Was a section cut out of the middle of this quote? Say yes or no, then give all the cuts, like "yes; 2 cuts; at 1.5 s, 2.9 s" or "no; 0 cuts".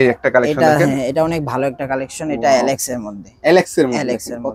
no; 0 cuts